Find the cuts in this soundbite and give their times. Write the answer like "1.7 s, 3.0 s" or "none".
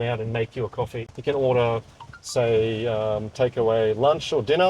1.0 s